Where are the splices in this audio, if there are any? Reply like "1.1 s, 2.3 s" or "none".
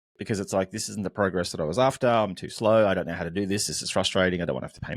none